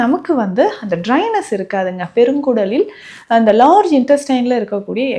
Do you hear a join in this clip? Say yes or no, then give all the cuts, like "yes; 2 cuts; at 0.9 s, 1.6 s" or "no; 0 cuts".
no; 0 cuts